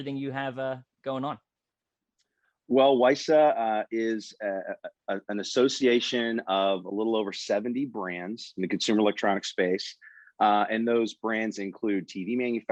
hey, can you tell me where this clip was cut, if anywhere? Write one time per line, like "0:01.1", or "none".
none